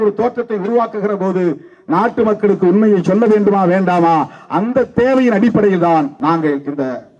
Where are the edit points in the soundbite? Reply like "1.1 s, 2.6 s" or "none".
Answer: 6.1 s